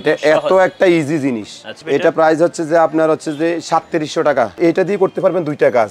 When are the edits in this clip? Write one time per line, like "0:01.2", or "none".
0:01.7
0:04.6